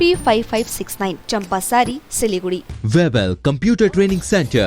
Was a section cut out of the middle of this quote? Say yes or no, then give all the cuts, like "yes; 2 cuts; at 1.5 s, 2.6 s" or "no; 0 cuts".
yes; 1 cut; at 2.7 s